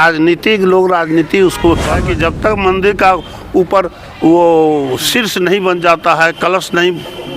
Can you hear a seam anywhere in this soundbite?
yes; 1 cut; at 2.0 s

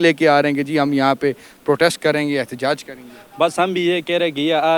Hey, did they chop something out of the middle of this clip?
no; 0 cuts

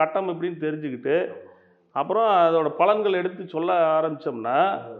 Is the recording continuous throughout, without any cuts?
yes; 0 cuts

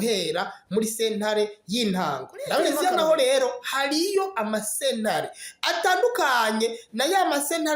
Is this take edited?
yes; 1 cut; at 2.8 s

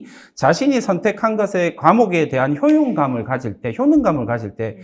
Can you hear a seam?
no; 0 cuts

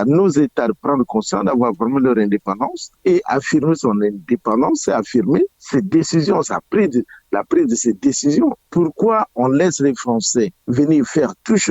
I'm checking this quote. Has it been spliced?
yes; 4 cuts; at 2.8 s, 5.6 s, 8.6 s, 10.6 s

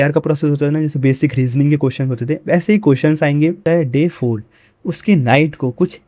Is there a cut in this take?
yes; 1 cut; at 3.6 s

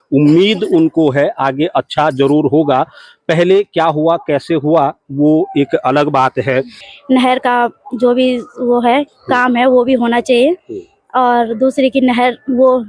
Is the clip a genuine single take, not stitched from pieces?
no; 1 cut; at 6.9 s

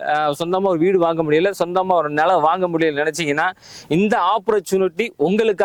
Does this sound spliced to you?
no; 0 cuts

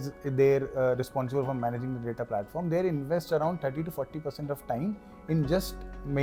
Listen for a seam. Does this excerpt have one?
no; 0 cuts

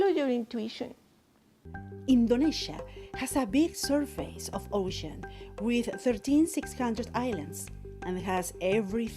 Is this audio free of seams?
no; 1 cut; at 1.5 s

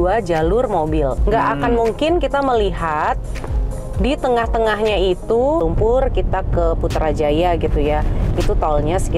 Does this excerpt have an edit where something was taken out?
yes; 1 cut; at 5.6 s

